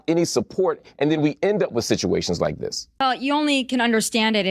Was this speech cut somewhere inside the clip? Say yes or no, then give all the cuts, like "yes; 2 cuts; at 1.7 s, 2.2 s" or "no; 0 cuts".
yes; 1 cut; at 3.0 s